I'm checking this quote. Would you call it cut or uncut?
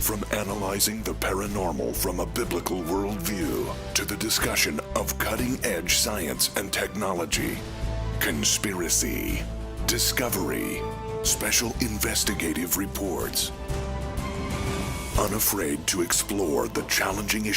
cut